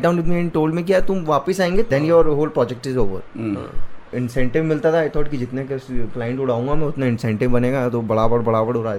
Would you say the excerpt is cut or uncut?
uncut